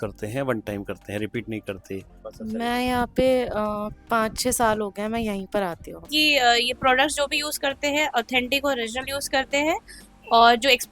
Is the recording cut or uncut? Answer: cut